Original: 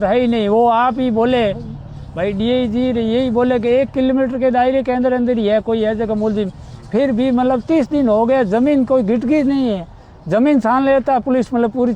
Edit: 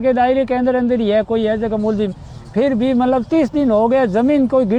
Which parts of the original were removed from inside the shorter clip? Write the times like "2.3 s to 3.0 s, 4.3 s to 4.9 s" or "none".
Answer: none